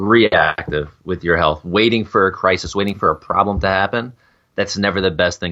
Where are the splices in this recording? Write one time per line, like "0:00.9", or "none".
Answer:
none